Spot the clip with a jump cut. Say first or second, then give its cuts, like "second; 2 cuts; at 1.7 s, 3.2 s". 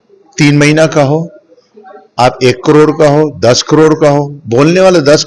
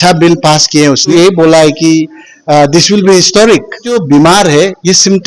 second; 2 cuts; at 1.1 s, 3.9 s